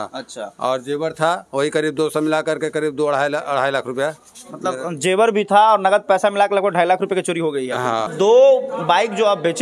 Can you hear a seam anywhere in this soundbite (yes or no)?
yes